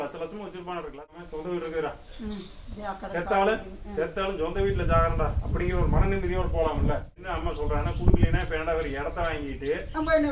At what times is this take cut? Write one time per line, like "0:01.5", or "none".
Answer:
0:01.1
0:07.2

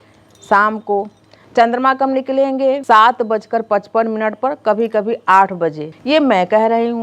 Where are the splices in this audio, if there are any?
0:02.8
0:05.9

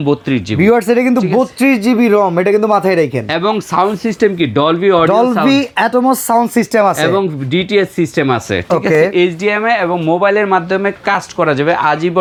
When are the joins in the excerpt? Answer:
none

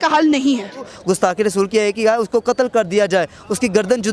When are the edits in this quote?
0:00.9

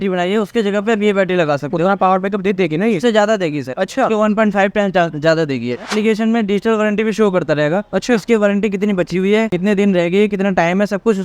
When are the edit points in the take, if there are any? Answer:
0:05.9

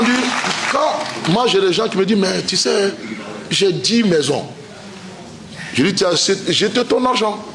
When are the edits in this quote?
none

